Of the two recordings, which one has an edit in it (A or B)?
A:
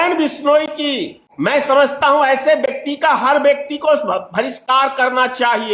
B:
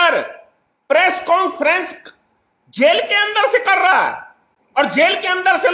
A